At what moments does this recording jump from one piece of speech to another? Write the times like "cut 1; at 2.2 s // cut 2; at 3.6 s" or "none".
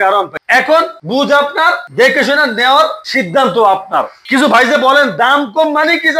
cut 1; at 4.2 s